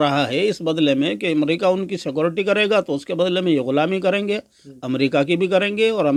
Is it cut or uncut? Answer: uncut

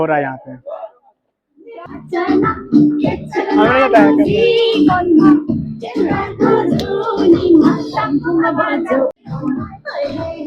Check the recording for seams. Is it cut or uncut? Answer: cut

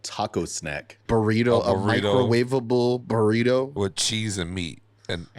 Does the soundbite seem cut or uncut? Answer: cut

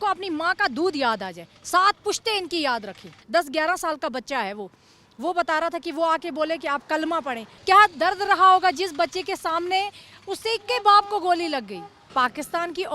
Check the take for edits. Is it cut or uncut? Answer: cut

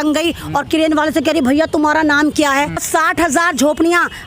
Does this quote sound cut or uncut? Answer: cut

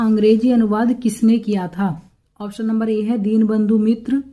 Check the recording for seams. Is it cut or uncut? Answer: uncut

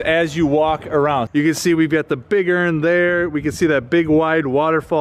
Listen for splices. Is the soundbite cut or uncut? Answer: cut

